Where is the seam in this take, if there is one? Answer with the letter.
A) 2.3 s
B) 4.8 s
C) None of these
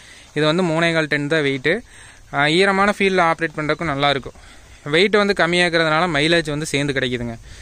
C